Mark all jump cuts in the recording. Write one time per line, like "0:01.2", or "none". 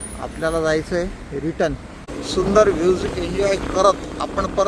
0:02.1